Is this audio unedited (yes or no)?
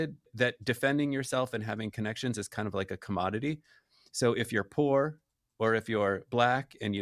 yes